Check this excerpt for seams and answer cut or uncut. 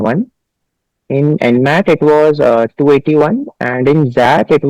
uncut